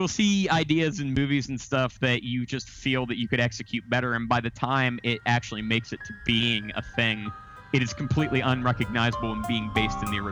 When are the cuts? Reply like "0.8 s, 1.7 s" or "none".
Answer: none